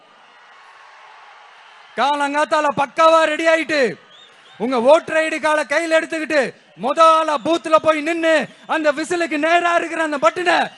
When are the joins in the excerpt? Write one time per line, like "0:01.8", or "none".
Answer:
none